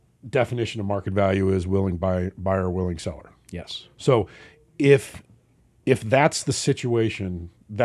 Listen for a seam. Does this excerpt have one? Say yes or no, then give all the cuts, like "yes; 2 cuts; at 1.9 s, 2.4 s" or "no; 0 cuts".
no; 0 cuts